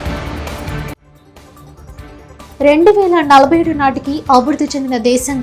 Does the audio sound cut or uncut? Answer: cut